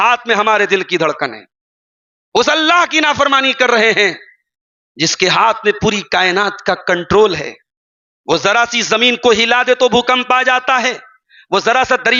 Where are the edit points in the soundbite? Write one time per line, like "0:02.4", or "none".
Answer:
none

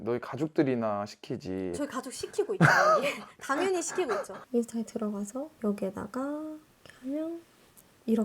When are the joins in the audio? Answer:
0:04.4
0:05.5
0:06.7

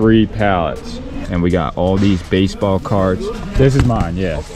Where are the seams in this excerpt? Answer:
0:01.1
0:03.4

